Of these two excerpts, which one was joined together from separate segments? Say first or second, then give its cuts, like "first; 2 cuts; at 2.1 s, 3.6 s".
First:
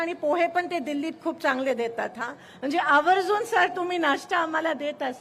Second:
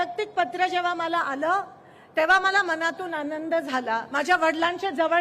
second; 1 cut; at 4.1 s